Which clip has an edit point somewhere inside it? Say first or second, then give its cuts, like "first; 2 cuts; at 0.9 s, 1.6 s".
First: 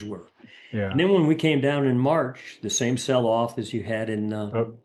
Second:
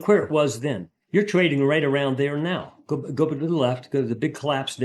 second; 1 cut; at 0.9 s